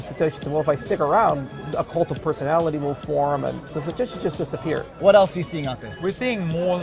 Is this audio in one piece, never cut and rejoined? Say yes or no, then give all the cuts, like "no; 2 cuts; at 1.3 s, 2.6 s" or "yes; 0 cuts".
no; 3 cuts; at 3.7 s, 4.9 s, 5.9 s